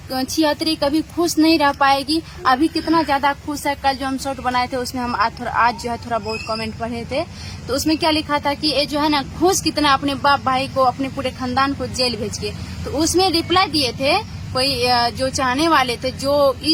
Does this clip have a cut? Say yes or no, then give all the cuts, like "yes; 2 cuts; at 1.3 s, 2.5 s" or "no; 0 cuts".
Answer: no; 0 cuts